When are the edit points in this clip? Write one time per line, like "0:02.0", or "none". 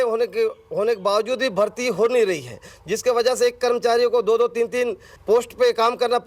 0:05.1

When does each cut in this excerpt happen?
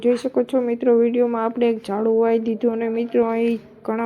0:03.0

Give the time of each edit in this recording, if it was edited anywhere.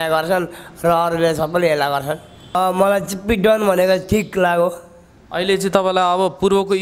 0:02.6

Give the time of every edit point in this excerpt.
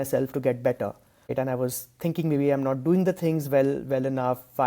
0:01.3

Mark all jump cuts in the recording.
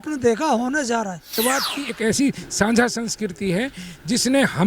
0:01.4

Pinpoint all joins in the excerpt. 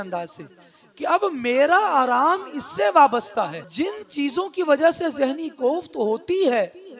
0:03.6

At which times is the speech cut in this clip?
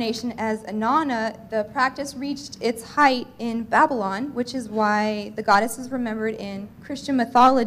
none

